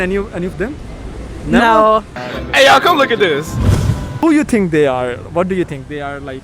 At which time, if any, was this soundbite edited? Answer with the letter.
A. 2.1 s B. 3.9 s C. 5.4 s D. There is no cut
A